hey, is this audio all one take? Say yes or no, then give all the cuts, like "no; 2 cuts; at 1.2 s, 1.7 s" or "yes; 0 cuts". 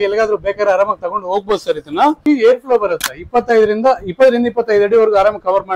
no; 1 cut; at 2.2 s